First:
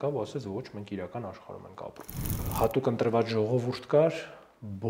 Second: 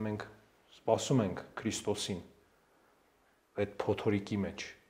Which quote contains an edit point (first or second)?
first